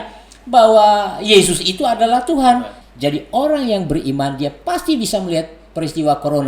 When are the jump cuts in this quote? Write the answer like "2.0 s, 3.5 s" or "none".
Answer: 2.7 s